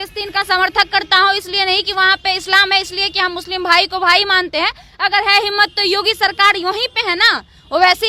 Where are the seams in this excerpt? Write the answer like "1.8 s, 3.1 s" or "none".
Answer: none